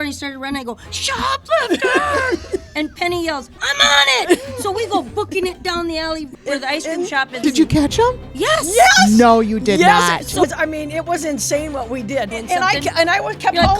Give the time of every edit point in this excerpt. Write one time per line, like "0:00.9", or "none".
0:06.3
0:07.4
0:10.4
0:12.4